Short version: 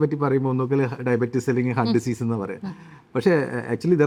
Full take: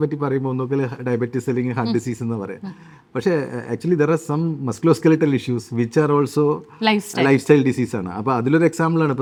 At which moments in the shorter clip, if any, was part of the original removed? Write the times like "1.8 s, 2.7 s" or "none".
none